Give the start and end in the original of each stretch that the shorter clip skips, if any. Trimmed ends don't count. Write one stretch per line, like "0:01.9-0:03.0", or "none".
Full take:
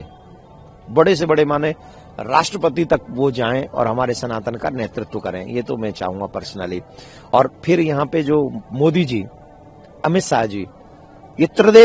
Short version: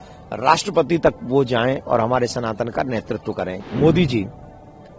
0:05.5-0:08.6